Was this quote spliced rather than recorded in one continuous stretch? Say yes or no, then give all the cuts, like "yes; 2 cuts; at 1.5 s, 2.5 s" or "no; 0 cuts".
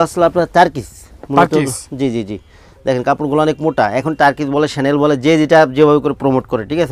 no; 0 cuts